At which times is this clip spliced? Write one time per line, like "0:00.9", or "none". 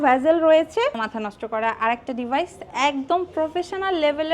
0:01.0